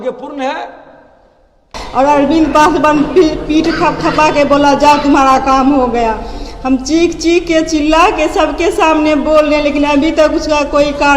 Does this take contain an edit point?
yes; 1 cut; at 1.7 s

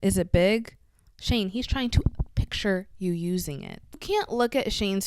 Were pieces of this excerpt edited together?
yes; 1 cut; at 3.9 s

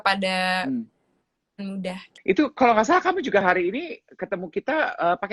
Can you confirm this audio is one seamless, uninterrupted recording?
no; 1 cut; at 2.1 s

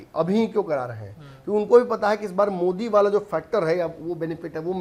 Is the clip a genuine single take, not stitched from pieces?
yes; 0 cuts

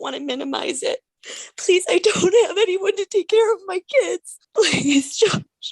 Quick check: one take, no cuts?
no; 2 cuts; at 1.2 s, 4.3 s

